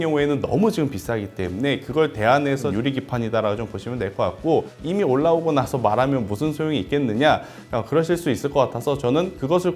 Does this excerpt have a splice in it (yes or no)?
yes